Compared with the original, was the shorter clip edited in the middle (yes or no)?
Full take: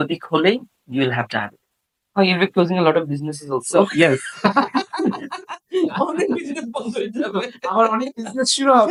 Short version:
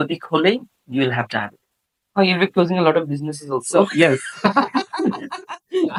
no